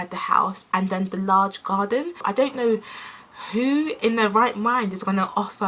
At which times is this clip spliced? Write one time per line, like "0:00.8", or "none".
0:02.2